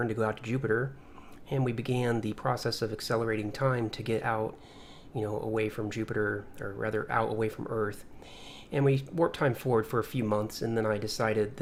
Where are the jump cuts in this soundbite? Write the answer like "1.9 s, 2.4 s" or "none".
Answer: none

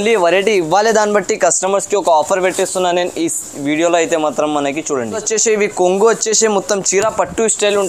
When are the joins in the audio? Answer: 5.2 s

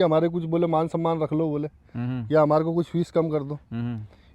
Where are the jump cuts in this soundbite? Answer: none

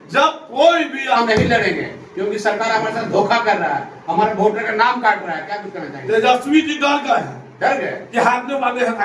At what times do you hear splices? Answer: 1.2 s

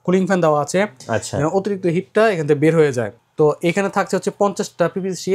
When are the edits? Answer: 3.1 s

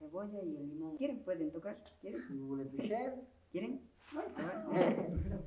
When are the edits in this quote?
1.0 s

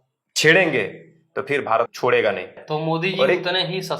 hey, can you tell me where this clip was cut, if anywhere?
1.9 s, 2.6 s

